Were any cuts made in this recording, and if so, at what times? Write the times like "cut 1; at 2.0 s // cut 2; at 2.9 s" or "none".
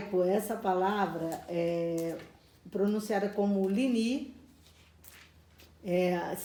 none